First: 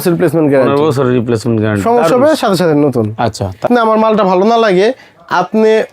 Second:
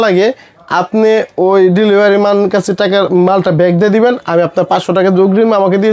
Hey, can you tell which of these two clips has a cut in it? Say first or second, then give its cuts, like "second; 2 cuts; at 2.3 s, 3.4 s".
first; 1 cut; at 3.6 s